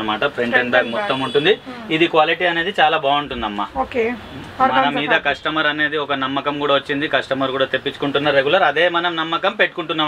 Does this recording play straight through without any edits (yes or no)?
yes